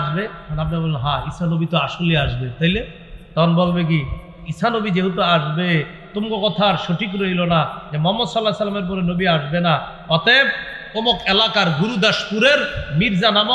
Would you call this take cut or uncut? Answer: uncut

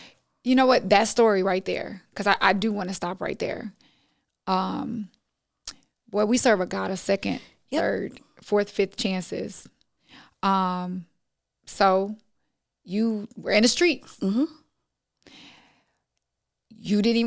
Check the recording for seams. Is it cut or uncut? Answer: uncut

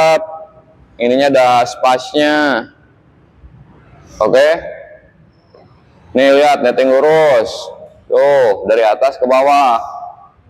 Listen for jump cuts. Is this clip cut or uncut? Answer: uncut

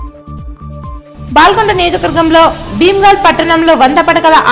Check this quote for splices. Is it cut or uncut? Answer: uncut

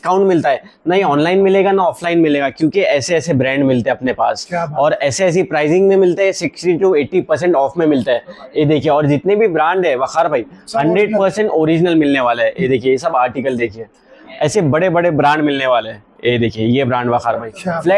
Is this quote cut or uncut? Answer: uncut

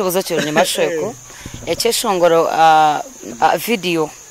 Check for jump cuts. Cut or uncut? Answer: cut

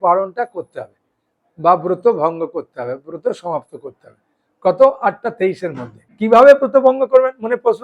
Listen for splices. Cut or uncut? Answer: cut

